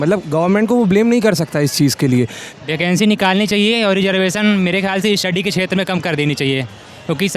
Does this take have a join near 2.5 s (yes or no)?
yes